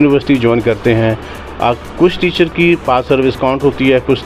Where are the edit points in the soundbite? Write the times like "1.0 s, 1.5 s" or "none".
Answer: none